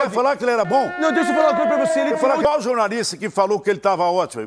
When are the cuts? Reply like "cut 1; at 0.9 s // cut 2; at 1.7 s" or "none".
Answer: cut 1; at 2.4 s